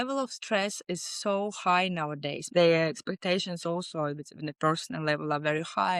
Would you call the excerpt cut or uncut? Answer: cut